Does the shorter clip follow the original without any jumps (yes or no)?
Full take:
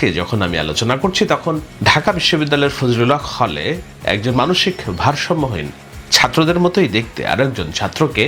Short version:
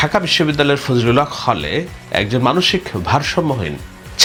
yes